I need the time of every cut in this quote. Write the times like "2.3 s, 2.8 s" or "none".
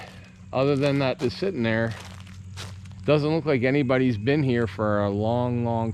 1.2 s

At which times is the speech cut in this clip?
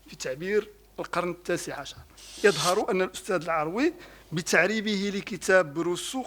2.4 s

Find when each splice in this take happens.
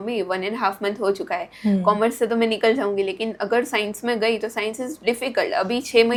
none

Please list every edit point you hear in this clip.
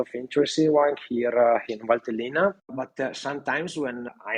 none

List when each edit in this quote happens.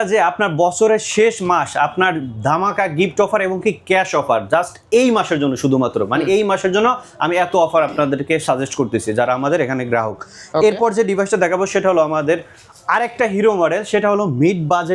none

